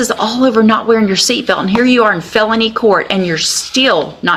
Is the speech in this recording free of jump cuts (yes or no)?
yes